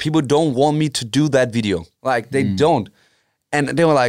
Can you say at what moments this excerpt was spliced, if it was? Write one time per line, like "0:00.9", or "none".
0:01.9